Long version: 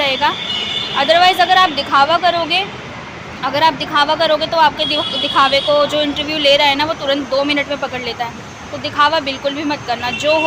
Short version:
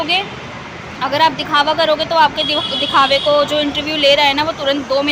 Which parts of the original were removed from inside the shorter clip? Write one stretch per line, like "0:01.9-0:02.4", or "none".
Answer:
none

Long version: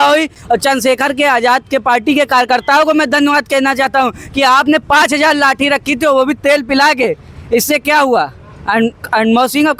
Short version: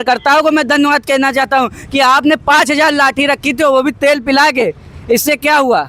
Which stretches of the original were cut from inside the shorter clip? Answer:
none

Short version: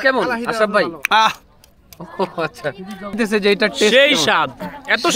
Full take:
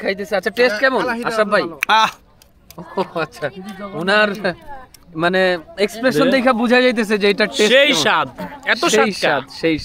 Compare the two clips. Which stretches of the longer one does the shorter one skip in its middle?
0:03.9-0:06.9

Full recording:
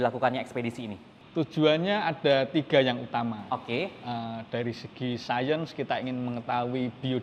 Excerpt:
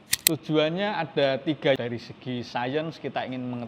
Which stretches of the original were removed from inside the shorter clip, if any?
0:02.8-0:04.5

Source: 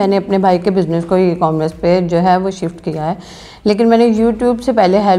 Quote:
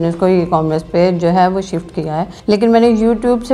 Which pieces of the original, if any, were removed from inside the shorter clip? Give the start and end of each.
0:03.2-0:03.5

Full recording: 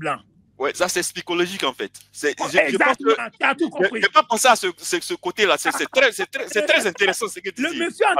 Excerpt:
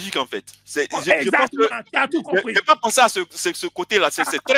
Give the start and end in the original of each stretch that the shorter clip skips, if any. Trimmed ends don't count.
none

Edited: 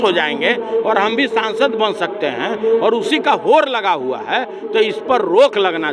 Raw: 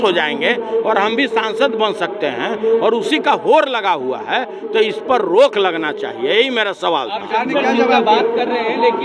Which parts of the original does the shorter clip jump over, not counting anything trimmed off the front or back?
none

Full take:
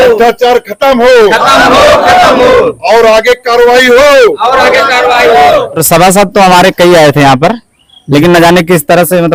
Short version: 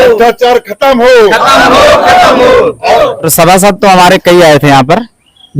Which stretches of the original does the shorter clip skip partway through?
0:02.9-0:05.5

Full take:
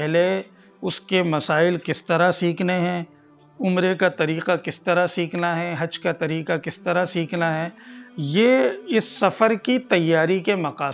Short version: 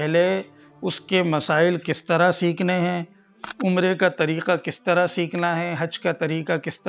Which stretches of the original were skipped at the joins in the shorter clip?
none

